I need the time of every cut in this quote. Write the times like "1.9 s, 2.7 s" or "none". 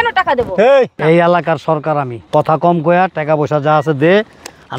1.0 s, 2.2 s